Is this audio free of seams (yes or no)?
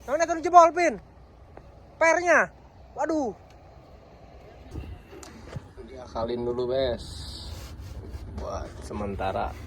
no